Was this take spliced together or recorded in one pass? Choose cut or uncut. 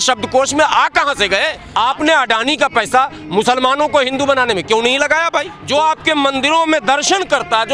cut